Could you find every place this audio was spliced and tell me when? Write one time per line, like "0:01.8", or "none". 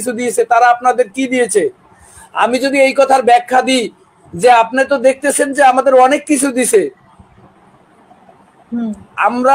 none